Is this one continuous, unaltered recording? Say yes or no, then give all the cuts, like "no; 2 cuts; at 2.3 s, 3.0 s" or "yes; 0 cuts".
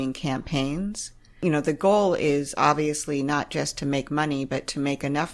no; 1 cut; at 1.3 s